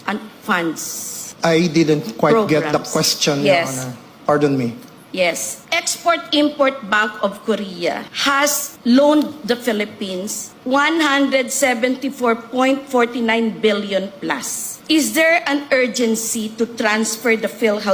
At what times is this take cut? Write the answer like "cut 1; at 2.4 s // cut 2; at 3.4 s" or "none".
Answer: none